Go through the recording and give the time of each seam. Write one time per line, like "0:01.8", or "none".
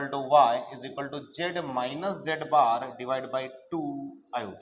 none